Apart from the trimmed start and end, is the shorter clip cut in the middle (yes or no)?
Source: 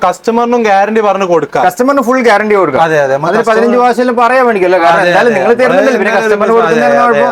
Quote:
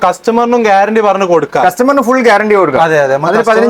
no